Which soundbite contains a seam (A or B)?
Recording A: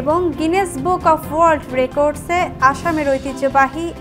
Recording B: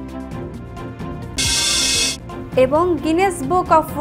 B